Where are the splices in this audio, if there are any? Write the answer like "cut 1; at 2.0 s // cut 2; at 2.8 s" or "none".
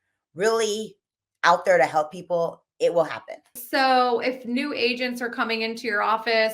cut 1; at 3.6 s